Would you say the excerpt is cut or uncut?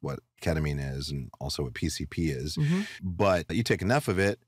cut